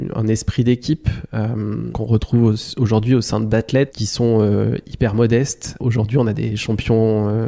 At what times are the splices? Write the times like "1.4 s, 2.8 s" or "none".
1.9 s, 4.0 s, 6.6 s